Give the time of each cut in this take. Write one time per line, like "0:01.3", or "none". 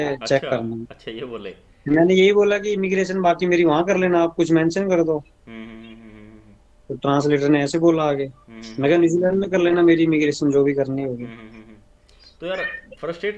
none